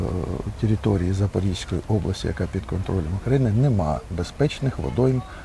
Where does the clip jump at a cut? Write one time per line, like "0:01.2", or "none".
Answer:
none